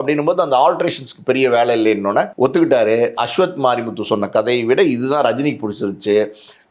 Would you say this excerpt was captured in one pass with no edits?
no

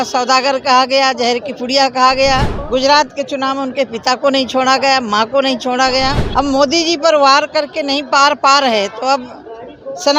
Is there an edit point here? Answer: yes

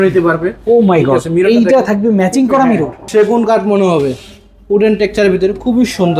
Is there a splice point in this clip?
yes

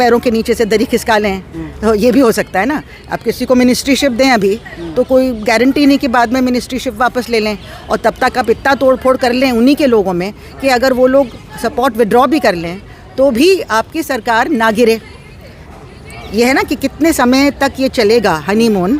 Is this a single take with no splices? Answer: yes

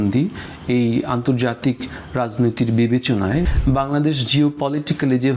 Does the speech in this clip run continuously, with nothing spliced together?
no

